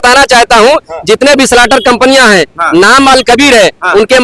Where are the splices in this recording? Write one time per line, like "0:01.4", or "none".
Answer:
none